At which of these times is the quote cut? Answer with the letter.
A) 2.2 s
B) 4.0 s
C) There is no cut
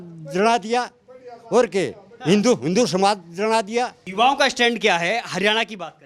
B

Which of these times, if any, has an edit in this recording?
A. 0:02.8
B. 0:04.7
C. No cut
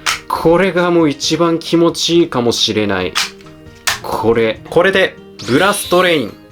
B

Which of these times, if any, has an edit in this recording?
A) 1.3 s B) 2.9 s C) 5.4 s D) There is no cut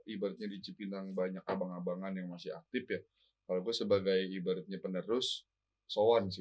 D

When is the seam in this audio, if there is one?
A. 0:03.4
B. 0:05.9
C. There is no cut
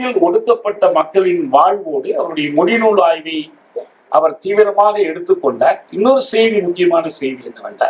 C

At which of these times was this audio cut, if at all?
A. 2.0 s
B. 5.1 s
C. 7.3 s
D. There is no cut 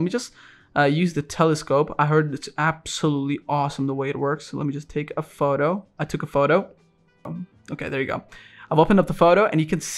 C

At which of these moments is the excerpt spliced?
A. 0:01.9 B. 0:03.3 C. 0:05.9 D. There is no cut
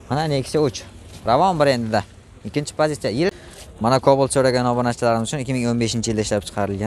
B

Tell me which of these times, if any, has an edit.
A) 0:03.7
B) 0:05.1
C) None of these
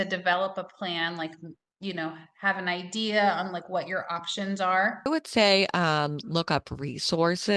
B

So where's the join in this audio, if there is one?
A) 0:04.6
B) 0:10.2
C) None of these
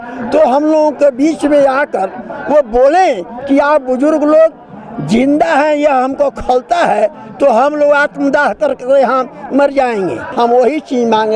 B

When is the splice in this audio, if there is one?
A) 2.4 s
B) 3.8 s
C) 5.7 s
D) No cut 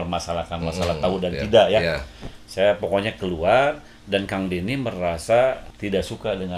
C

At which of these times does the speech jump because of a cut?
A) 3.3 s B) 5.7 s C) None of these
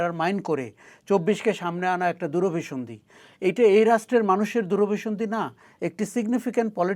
C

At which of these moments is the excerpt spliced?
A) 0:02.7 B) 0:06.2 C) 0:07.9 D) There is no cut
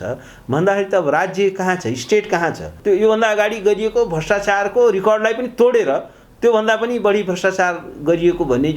A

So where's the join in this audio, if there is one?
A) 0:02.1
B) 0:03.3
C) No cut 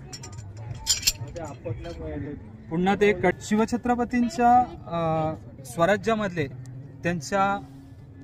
B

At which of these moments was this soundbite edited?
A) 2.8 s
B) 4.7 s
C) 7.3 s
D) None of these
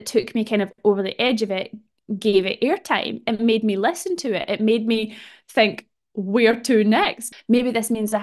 C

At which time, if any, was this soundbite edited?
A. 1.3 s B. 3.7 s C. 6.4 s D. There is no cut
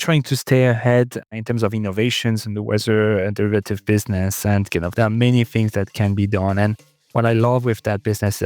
A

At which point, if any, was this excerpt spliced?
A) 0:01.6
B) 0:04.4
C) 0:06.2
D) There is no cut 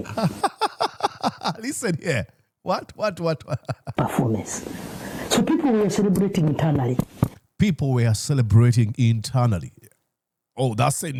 D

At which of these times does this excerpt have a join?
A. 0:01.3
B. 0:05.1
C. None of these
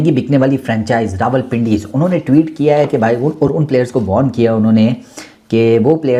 C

